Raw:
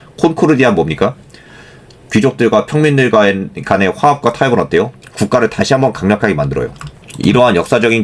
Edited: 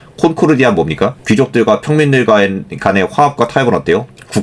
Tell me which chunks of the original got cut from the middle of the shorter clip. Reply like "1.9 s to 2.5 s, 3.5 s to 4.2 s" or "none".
1.2 s to 2.0 s